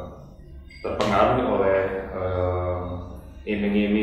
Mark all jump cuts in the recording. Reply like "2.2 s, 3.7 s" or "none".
none